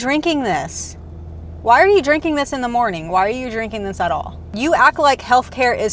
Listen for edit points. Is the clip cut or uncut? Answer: cut